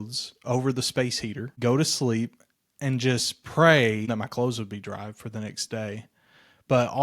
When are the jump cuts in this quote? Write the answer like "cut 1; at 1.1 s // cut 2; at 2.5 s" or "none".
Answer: cut 1; at 1.5 s // cut 2; at 4.1 s